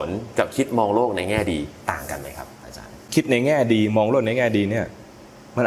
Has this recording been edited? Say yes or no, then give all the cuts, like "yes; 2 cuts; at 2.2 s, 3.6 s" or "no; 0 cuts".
yes; 1 cut; at 3.1 s